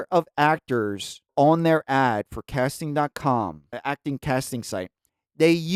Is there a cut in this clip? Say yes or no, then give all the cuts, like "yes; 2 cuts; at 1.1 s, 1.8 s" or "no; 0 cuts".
no; 0 cuts